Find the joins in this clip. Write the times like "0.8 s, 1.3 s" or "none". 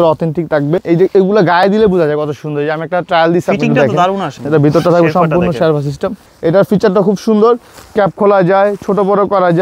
0.8 s, 4.3 s, 6.3 s